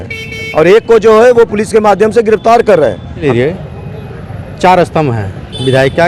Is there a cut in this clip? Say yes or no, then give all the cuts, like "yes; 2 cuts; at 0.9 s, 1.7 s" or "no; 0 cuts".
yes; 1 cut; at 3.2 s